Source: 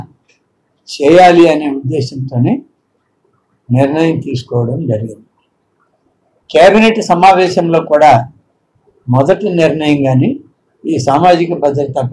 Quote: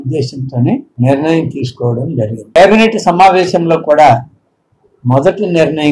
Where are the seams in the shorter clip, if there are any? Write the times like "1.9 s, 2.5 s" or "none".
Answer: 0.9 s, 2.6 s